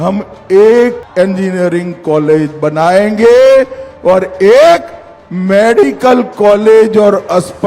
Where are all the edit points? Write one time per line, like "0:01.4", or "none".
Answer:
0:01.0